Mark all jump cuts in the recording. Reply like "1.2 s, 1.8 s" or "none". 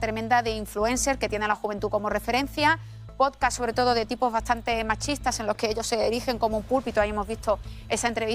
none